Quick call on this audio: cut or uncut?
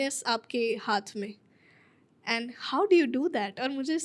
uncut